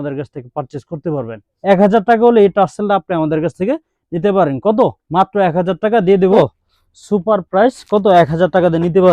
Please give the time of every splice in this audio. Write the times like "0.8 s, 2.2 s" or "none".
1.5 s, 6.2 s